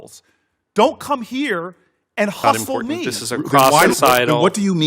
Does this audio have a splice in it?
yes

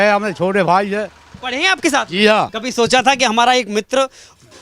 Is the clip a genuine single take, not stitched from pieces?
no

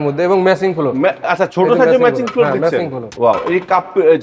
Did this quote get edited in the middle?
yes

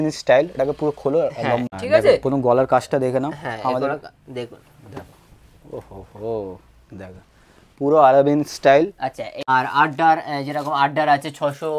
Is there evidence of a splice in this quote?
yes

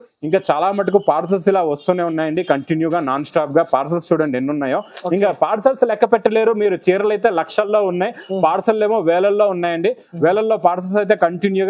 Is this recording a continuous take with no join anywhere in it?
yes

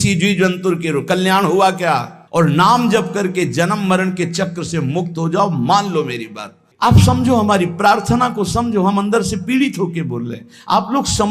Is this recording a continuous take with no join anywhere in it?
no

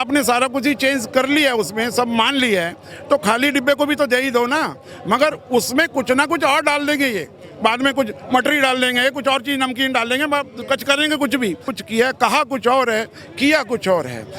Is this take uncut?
no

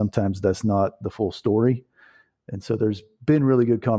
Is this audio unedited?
yes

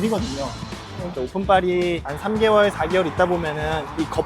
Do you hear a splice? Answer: yes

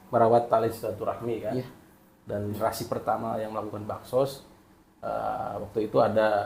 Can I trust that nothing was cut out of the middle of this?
no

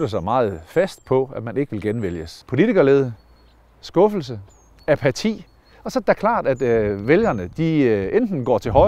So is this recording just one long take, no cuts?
no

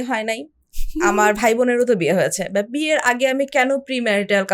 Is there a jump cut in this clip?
no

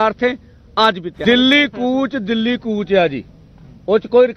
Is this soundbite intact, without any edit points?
no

